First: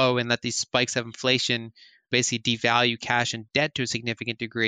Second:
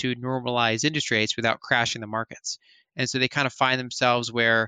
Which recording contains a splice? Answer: first; 2 cuts; at 2.1 s, 3.4 s

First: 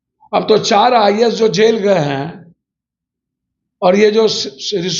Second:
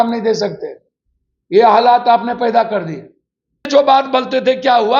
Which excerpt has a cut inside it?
second; 1 cut; at 3.7 s

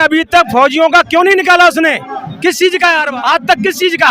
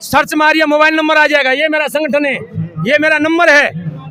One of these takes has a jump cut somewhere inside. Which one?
first; 1 cut; at 3.0 s

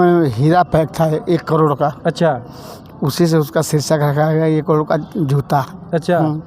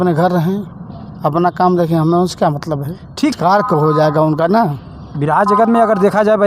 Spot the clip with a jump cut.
second; 1 cut; at 3.3 s

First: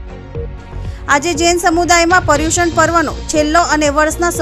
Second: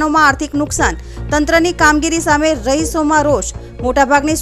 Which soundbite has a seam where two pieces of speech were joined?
first; 1 cut; at 1.1 s

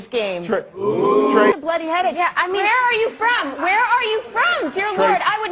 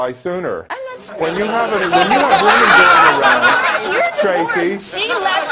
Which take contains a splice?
first; 1 cut; at 1.5 s

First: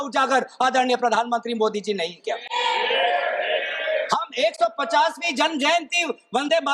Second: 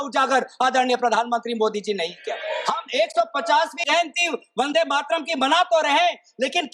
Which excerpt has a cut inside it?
second; 2 cuts; at 2.4 s, 3.9 s

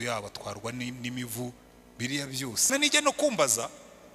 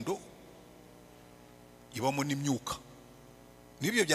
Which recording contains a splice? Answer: first; 1 cut; at 2.7 s

